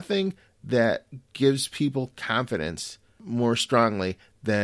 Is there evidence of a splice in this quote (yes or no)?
yes